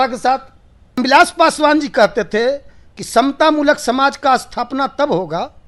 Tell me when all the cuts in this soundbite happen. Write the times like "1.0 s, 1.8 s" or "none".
1.0 s

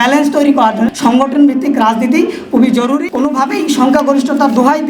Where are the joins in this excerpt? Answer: 0.9 s, 3.1 s

